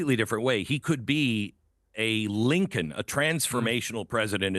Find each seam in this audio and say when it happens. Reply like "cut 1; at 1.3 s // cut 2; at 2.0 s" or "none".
none